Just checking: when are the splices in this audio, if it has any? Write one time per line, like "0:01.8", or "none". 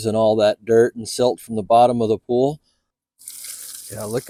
none

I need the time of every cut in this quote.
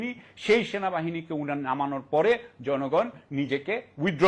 none

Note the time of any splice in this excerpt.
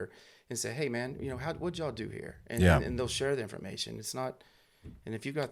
none

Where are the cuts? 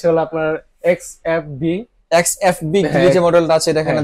0:01.1

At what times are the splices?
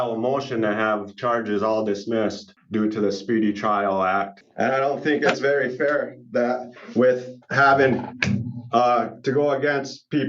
0:02.5
0:04.4

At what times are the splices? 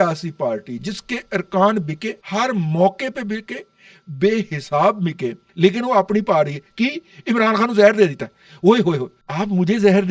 0:02.1
0:05.4
0:09.2

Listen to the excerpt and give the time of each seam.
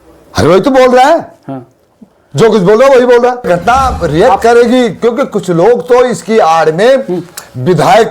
0:03.5

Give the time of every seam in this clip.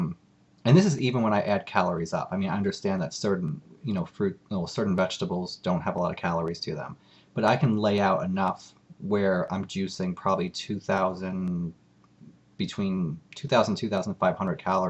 none

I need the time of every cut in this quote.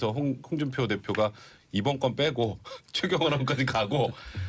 none

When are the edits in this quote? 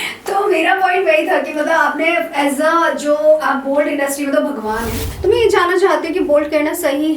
0:05.1

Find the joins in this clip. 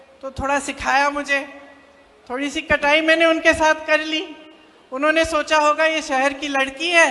none

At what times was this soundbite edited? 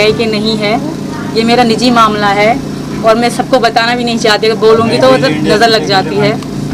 none

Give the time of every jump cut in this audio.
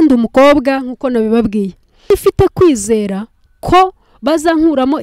0:02.1

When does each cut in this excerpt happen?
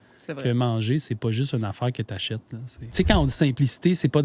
0:02.8

